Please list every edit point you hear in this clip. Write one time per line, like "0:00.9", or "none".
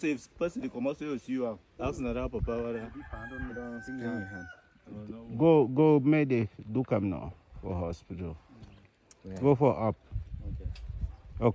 0:01.8